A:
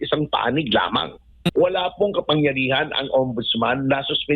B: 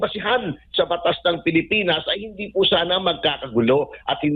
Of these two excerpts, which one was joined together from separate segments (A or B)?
A